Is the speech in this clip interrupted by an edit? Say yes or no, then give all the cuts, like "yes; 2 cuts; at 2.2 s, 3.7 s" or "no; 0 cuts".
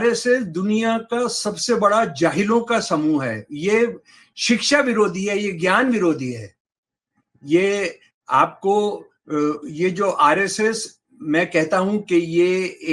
no; 0 cuts